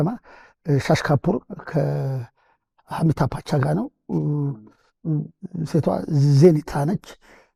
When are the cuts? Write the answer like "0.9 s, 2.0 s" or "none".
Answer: none